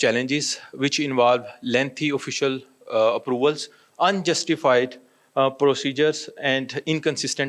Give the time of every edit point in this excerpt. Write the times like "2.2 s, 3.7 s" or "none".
none